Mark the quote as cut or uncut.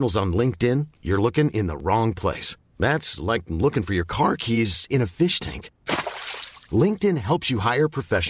uncut